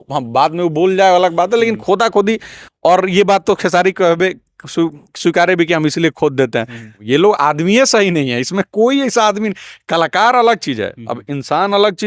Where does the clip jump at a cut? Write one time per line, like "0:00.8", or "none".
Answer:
0:07.0